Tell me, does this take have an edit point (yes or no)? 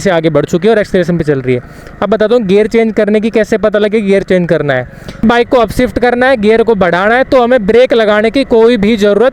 yes